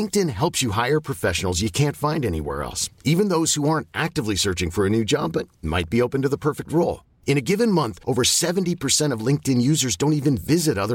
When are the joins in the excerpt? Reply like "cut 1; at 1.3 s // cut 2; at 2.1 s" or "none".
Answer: none